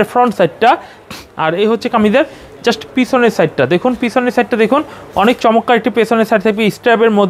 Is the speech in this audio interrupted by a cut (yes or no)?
no